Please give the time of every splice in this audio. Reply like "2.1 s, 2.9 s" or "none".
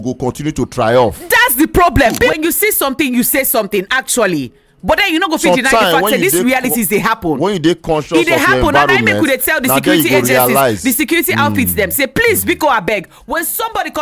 2.3 s